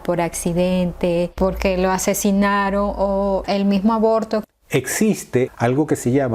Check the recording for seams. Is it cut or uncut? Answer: cut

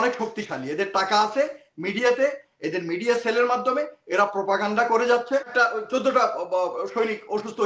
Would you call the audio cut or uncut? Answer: cut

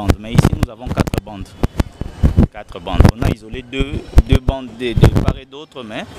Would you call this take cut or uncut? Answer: uncut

